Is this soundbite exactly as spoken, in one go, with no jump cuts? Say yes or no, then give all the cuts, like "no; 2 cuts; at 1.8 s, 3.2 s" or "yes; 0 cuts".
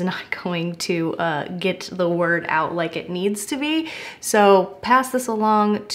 yes; 0 cuts